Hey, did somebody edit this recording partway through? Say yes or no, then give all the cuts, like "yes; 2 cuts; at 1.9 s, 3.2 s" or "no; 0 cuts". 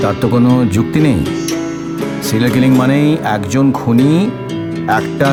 no; 0 cuts